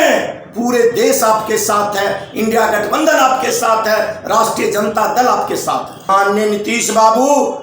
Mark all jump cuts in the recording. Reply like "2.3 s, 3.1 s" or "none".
6.0 s